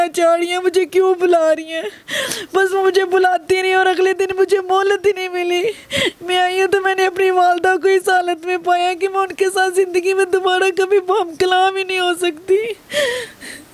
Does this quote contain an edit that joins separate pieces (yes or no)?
no